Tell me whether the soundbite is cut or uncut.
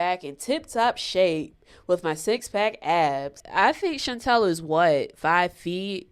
cut